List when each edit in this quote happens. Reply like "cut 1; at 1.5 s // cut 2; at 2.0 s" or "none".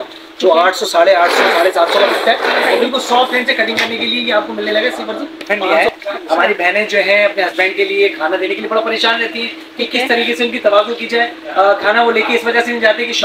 cut 1; at 5.6 s

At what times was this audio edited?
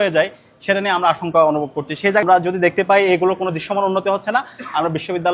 cut 1; at 2.2 s

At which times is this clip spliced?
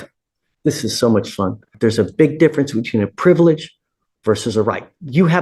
cut 1; at 1.7 s

